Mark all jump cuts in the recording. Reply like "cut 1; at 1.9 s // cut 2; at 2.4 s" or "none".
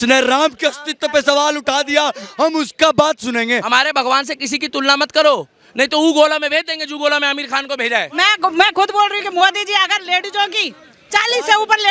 cut 1; at 3.6 s // cut 2; at 8.1 s